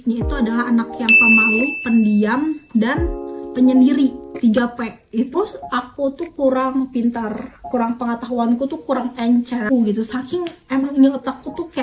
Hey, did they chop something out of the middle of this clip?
yes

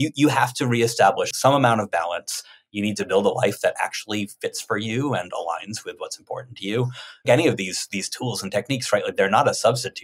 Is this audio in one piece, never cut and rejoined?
no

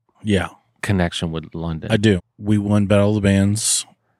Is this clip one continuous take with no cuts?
no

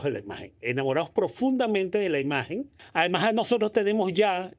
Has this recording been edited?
yes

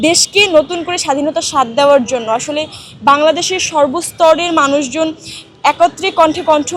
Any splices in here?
no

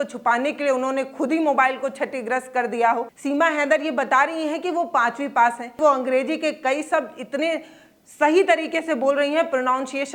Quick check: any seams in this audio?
yes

